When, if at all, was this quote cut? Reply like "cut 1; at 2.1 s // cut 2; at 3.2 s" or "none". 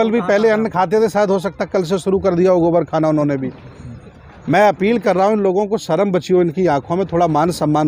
none